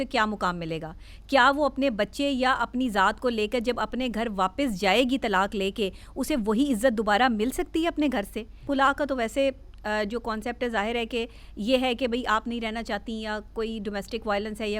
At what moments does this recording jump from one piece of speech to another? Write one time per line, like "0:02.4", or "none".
0:08.6